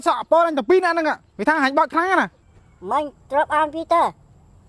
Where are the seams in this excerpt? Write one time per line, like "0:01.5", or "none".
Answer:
none